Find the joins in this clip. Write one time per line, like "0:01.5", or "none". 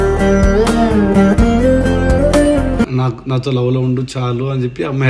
0:02.9